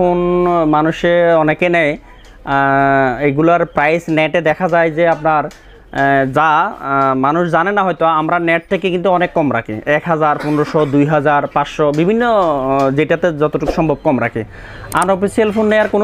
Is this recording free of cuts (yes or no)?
yes